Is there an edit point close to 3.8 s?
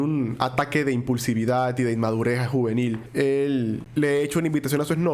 yes; 2 cuts; at 3.0 s, 3.8 s

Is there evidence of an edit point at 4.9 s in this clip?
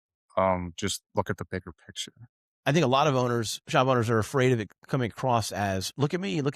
no; 1 cut; at 2.5 s

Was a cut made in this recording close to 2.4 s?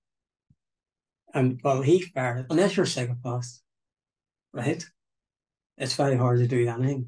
yes; 1 cut; at 2.4 s

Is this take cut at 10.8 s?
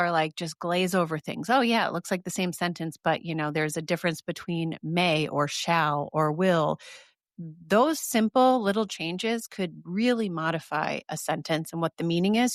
no; 0 cuts

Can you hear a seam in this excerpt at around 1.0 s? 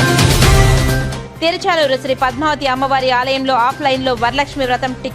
yes; 1 cut; at 1.0 s

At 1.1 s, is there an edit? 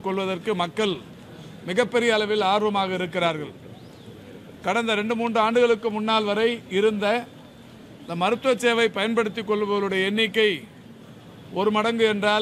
no; 0 cuts

